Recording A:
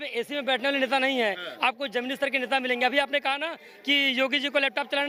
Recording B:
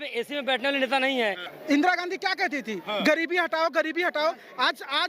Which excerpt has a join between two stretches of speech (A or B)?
B